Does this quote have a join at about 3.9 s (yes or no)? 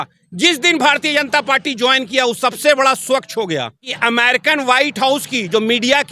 yes